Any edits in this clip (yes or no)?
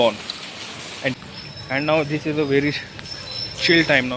yes